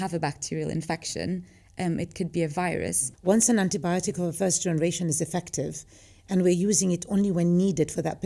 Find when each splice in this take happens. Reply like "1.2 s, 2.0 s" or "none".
3.1 s